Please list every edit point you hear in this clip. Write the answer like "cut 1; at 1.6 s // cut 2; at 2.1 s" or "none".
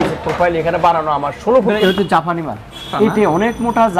cut 1; at 1.8 s // cut 2; at 2.9 s

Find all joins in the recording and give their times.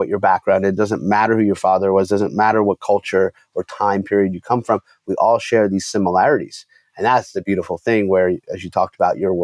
none

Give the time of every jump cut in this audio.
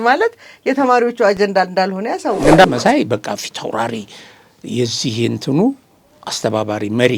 cut 1; at 2.6 s

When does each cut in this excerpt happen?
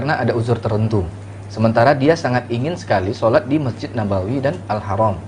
none

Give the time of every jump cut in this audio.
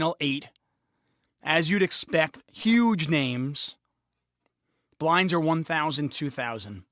cut 1; at 5.2 s

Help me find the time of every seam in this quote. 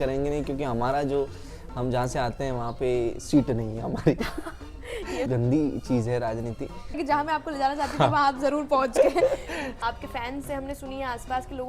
cut 1; at 5.3 s // cut 2; at 7.0 s // cut 3; at 9.6 s

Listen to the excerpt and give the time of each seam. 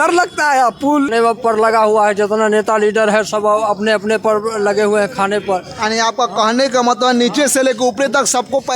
cut 1; at 1.1 s

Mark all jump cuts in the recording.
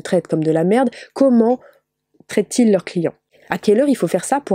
cut 1; at 3.2 s

